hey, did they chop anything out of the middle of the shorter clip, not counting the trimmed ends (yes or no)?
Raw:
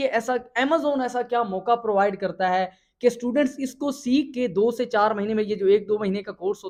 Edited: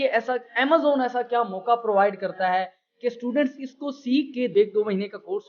yes